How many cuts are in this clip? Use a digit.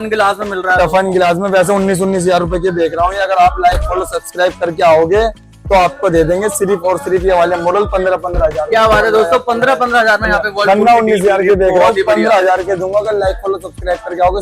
0